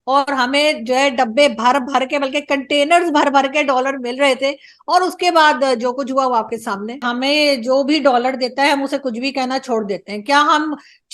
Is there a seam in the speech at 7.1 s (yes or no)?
yes